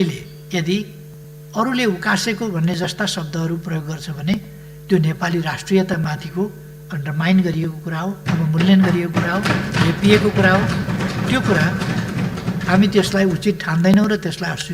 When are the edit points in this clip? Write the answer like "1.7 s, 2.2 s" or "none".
none